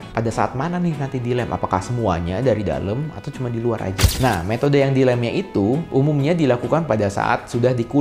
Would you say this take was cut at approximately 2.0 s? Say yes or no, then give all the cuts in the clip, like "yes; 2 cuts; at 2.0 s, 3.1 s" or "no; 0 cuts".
no; 1 cut; at 4.1 s